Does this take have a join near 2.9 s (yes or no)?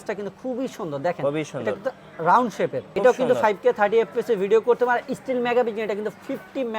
yes